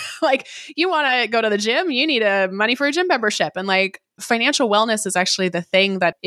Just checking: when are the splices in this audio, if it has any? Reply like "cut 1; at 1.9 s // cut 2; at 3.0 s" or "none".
cut 1; at 4.1 s